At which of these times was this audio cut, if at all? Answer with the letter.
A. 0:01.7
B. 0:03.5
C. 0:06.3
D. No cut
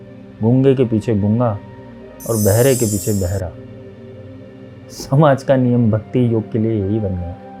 D